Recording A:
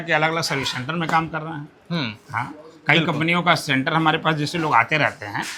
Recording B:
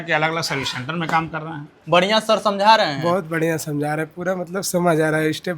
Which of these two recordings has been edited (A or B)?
B